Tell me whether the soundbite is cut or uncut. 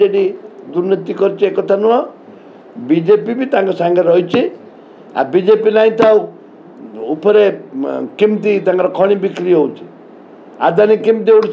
uncut